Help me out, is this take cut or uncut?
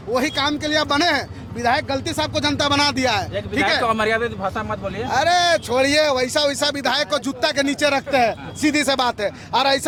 uncut